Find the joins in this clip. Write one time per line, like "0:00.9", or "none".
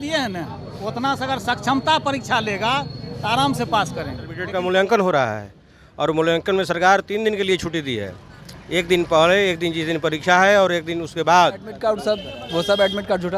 0:04.4
0:11.7

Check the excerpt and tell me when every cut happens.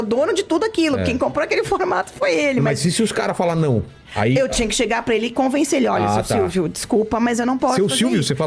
none

